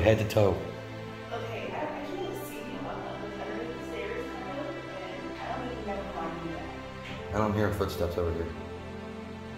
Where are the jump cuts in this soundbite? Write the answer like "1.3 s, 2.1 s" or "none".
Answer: 7.1 s